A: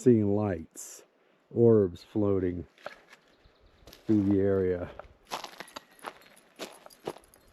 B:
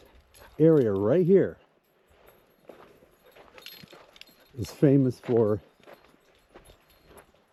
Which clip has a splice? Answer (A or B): A